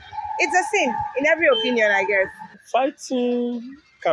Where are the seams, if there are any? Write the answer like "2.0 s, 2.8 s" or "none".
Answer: 2.6 s